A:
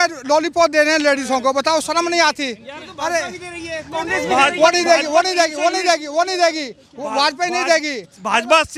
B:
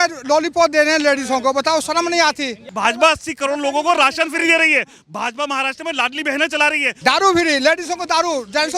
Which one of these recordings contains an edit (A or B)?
B